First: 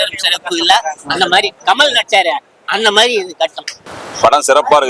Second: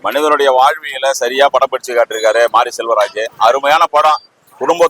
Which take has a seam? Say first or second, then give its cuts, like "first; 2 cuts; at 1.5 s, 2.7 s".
first; 1 cut; at 3.7 s